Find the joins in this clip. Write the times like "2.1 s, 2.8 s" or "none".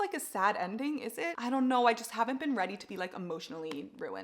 1.4 s